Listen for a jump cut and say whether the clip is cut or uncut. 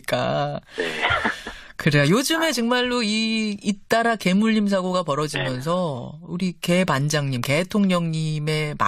cut